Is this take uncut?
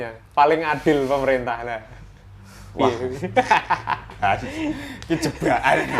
yes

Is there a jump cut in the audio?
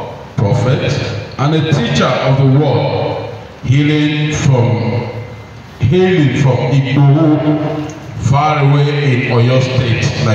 no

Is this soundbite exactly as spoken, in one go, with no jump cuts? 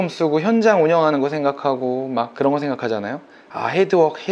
yes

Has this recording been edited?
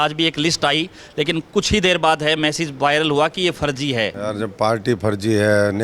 yes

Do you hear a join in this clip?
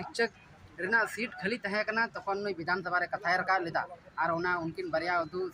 no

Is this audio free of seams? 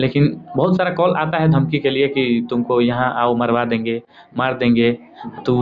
yes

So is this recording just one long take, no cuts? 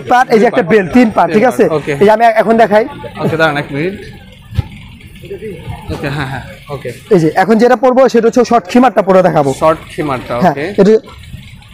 yes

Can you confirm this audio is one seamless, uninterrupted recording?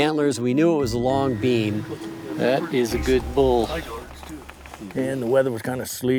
yes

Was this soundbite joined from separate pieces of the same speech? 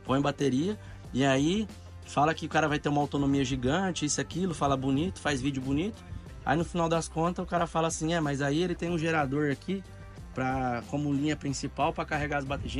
no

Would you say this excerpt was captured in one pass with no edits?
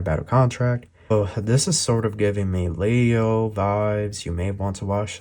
no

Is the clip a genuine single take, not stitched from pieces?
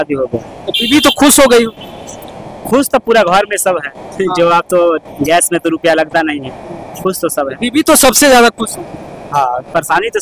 yes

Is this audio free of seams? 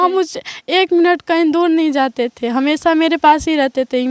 yes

